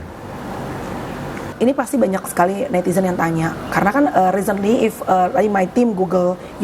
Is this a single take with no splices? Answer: no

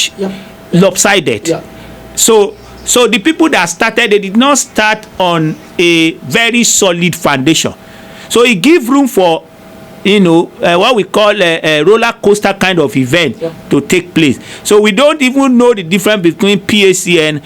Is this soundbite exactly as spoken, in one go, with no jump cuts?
yes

